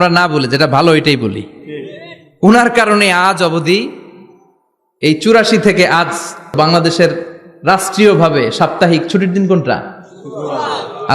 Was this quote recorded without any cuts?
no; 1 cut; at 6.5 s

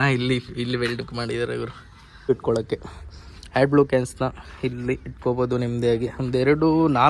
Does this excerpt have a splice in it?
yes; 1 cut; at 2.3 s

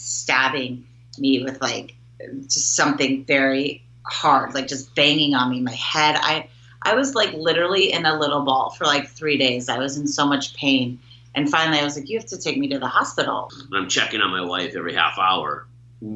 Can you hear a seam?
yes; 1 cut; at 13.5 s

